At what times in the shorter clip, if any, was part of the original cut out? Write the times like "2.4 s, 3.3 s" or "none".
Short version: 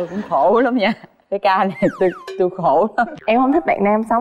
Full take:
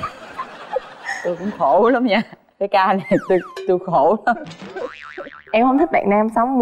3.2 s